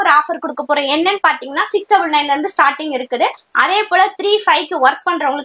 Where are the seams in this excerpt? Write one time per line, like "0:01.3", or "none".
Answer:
none